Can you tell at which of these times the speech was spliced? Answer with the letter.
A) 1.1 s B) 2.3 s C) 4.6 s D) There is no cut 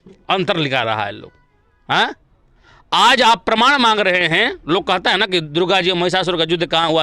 B